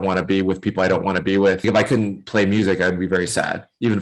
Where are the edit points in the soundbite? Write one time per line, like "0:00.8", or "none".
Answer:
0:01.6